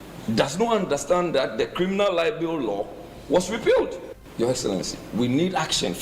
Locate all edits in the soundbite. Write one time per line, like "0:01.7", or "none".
0:04.1